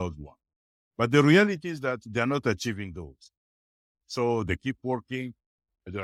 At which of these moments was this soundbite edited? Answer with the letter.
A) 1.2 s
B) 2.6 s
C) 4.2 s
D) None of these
D